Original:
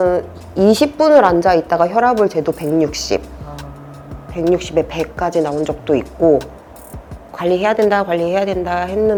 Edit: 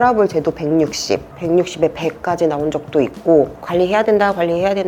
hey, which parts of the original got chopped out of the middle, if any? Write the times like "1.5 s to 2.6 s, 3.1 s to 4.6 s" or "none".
3.3 s to 4.3 s, 6.5 s to 7.3 s